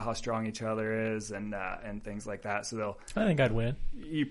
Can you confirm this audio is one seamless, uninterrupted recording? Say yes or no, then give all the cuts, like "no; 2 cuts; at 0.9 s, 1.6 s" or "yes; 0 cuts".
yes; 0 cuts